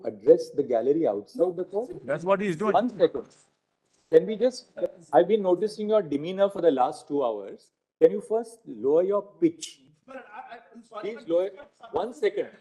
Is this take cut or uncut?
uncut